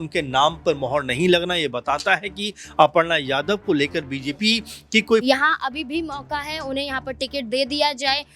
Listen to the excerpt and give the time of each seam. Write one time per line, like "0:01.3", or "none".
0:05.2